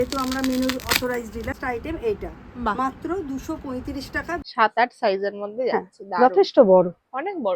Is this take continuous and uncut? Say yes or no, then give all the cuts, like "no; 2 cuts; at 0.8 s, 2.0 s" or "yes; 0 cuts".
no; 2 cuts; at 1.5 s, 4.3 s